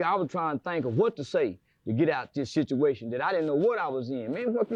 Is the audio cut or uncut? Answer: uncut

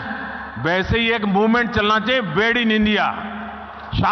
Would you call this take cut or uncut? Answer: uncut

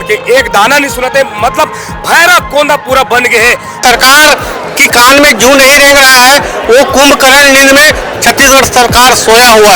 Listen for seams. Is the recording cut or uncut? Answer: cut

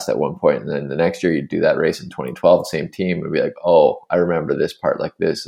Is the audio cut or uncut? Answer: uncut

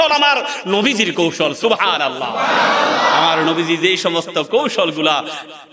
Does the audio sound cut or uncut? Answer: uncut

